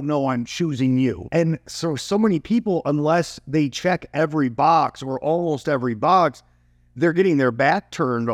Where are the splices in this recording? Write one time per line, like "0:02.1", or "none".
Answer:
0:01.2